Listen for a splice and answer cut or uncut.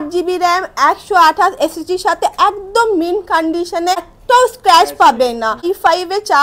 cut